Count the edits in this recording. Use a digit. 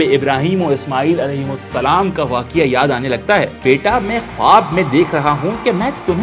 1